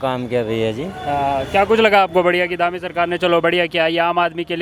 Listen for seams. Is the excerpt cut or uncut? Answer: uncut